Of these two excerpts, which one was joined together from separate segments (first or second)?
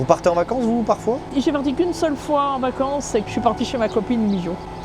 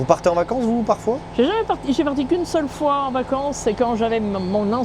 first